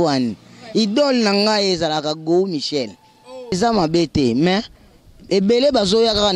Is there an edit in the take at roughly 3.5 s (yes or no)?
yes